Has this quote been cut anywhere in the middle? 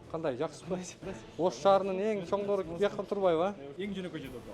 yes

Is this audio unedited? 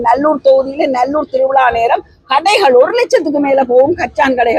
yes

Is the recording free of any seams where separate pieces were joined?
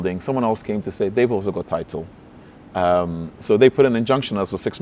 yes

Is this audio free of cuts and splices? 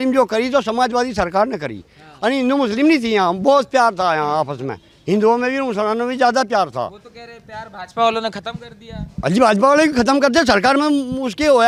yes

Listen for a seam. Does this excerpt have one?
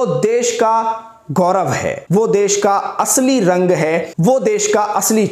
no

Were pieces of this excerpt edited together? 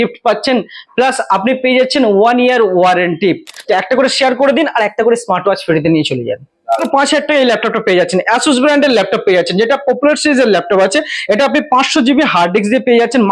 yes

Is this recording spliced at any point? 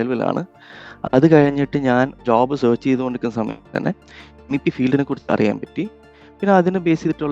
yes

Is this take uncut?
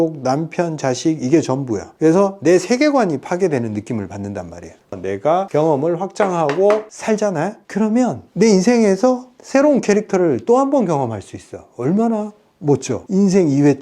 no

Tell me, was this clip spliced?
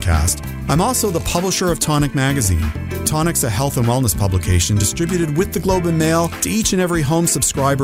yes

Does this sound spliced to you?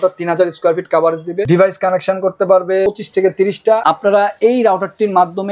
yes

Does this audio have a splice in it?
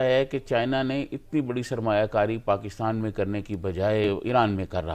yes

